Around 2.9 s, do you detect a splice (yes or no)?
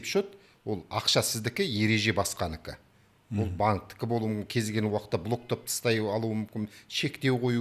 no